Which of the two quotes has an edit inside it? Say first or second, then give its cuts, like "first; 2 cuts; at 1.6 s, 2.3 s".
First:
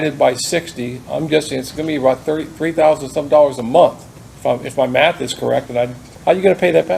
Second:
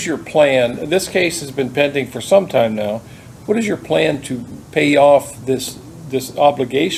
first; 1 cut; at 6.1 s